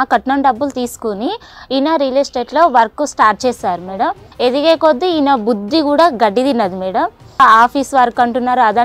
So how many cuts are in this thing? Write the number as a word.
two